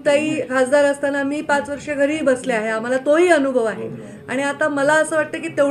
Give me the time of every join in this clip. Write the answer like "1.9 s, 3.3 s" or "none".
none